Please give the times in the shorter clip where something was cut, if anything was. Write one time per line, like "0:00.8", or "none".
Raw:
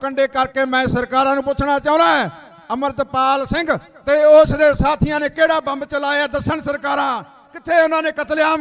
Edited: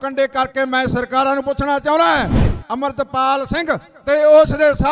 none

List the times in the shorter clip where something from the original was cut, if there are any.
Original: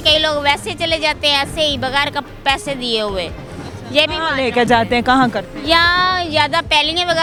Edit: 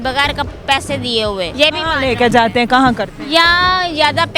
0:01.5

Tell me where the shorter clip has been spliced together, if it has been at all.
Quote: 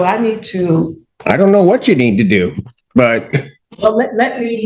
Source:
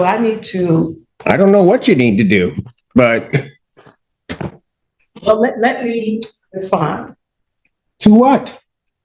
0:03.6

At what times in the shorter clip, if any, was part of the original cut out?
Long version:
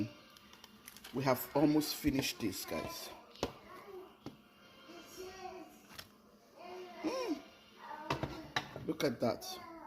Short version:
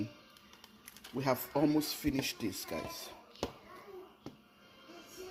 none

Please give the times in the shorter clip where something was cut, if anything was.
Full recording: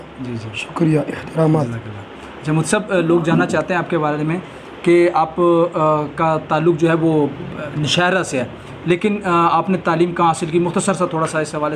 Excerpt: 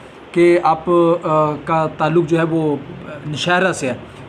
none

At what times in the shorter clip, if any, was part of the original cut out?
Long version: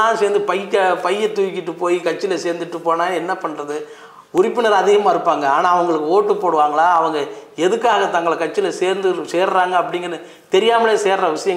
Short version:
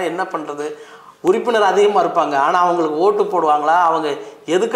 none

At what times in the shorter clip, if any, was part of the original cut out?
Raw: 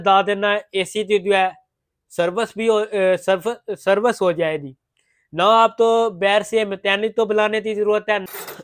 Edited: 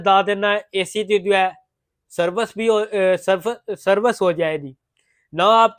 none

